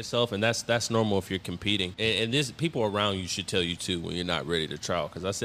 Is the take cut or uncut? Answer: cut